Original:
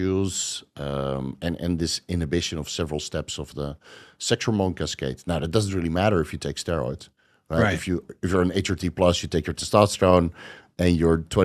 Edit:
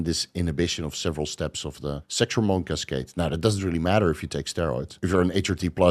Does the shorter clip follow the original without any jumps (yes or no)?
no